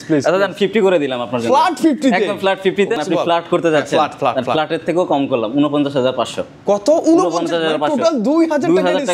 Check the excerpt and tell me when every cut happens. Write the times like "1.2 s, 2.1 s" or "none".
3.0 s